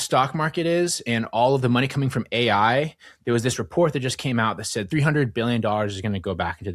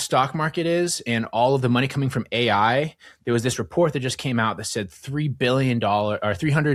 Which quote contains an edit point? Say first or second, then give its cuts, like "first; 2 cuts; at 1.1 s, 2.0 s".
first; 1 cut; at 4.9 s